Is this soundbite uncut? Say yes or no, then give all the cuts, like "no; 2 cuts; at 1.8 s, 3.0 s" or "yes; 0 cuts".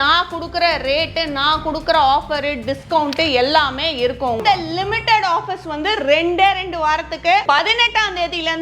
no; 2 cuts; at 4.4 s, 7.4 s